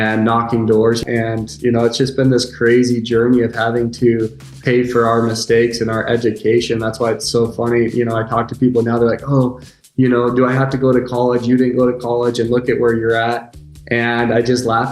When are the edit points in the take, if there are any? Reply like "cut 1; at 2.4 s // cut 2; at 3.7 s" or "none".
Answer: cut 1; at 1.0 s